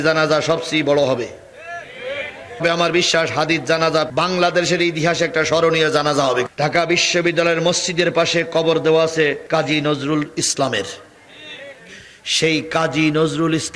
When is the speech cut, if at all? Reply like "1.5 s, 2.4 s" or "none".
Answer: 2.6 s, 6.5 s, 9.4 s